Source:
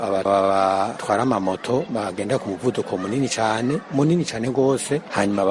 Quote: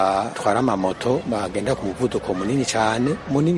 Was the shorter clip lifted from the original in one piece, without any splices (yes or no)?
yes